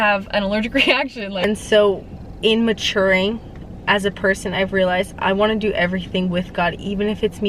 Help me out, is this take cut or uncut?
cut